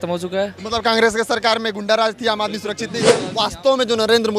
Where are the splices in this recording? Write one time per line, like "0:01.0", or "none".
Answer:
0:03.3